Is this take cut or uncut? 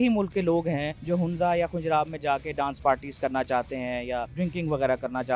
cut